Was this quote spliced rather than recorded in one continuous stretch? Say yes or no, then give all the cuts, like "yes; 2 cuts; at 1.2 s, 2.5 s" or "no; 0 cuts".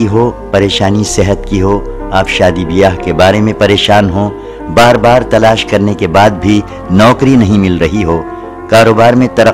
no; 0 cuts